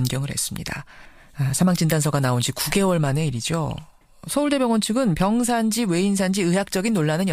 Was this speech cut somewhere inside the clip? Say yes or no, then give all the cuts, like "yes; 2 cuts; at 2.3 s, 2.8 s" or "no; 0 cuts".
no; 0 cuts